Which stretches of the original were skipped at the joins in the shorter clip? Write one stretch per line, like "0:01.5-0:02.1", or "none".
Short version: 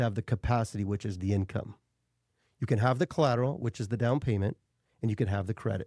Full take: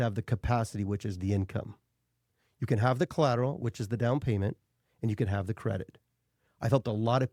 none